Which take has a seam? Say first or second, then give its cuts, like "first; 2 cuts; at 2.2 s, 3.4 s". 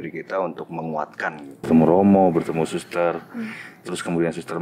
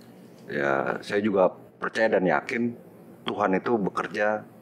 first; 1 cut; at 1.5 s